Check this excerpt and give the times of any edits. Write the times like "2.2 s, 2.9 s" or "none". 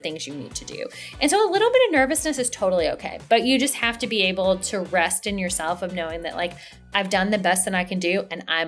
none